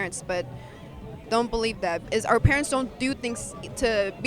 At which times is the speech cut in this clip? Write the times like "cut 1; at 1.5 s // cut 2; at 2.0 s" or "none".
cut 1; at 2.0 s